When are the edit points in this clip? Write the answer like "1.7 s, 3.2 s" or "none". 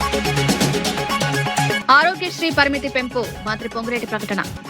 1.8 s